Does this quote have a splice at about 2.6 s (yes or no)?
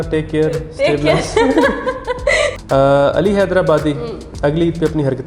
yes